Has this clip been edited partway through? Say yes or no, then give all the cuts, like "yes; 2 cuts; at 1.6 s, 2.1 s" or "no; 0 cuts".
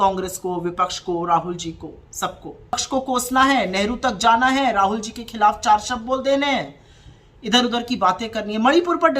yes; 1 cut; at 2.8 s